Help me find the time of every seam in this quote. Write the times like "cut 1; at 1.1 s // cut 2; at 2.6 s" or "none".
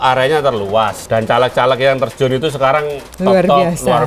cut 1; at 1.0 s